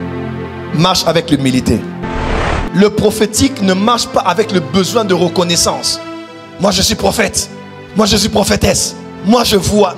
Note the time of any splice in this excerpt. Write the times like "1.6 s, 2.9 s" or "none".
2.3 s